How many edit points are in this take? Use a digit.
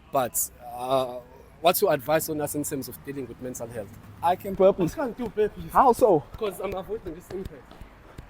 1